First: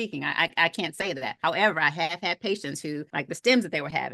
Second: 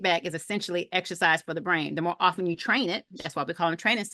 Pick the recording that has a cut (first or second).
first